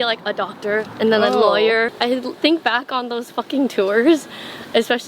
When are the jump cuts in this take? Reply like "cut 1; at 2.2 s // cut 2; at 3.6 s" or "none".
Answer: cut 1; at 1.9 s